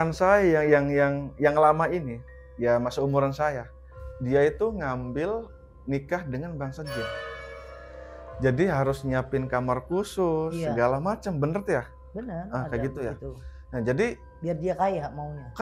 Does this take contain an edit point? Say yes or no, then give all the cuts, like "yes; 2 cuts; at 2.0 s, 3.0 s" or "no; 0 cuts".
no; 0 cuts